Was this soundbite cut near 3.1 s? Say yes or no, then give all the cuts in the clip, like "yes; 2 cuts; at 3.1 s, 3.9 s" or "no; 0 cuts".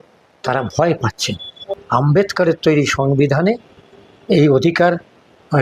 no; 1 cut; at 1.7 s